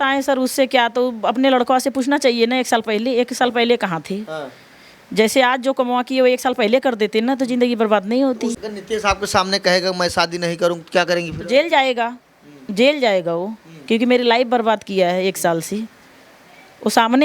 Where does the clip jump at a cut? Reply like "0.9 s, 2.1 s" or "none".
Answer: 8.5 s

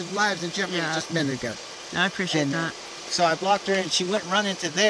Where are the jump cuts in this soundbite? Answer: none

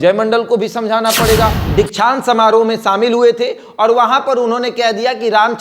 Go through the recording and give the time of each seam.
1.6 s

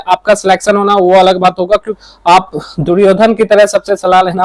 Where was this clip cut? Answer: 1.9 s

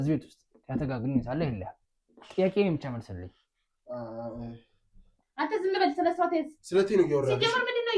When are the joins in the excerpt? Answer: 5.2 s

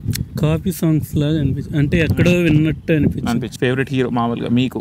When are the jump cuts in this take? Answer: 3.5 s

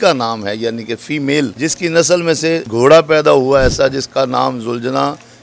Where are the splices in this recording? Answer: 1.5 s, 2.7 s

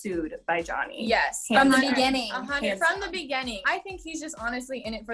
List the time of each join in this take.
3.6 s

